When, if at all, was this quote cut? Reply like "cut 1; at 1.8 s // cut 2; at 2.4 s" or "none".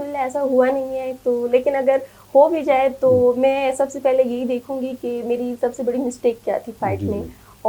none